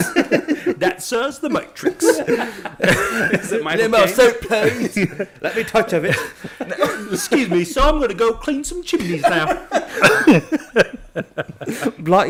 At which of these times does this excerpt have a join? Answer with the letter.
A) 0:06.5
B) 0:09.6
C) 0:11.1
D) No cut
D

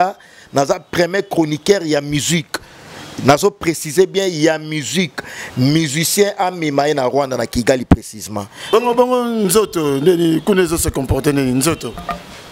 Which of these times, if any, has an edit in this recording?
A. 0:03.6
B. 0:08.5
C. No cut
B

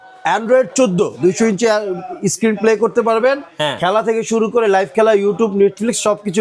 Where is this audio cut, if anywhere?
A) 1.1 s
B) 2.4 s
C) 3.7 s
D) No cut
A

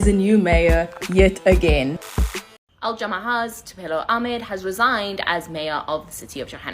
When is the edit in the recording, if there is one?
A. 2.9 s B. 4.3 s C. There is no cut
A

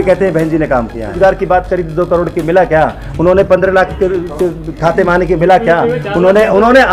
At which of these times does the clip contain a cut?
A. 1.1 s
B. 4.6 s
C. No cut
A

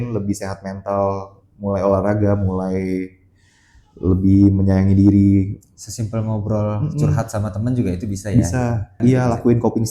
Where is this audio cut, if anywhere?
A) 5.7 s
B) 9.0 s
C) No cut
B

